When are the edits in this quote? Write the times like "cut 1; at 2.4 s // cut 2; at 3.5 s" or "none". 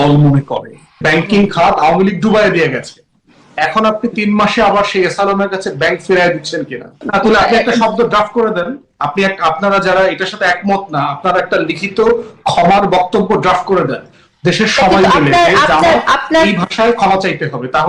cut 1; at 1.0 s // cut 2; at 7.0 s